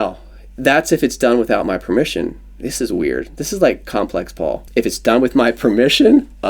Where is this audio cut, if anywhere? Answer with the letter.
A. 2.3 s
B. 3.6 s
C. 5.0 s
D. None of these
C